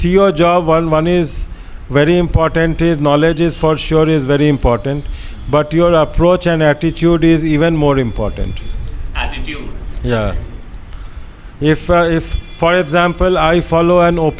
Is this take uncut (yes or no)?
yes